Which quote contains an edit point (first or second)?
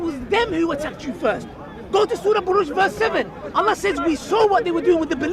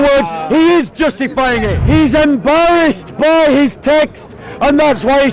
second